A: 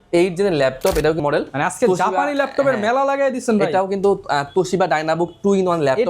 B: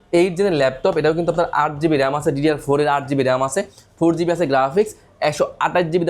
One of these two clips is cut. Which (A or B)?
A